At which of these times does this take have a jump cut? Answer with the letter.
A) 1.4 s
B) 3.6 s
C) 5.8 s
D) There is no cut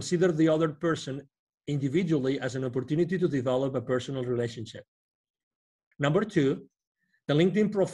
C